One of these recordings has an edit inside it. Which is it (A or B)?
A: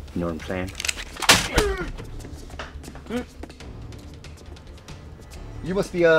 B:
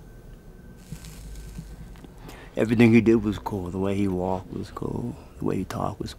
A